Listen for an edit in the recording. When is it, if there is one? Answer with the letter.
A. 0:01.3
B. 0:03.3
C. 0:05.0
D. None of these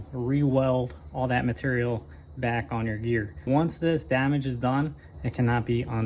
B